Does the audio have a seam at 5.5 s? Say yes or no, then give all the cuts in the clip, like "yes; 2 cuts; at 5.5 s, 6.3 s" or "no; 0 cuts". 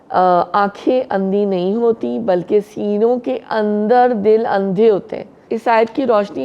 yes; 1 cut; at 5.5 s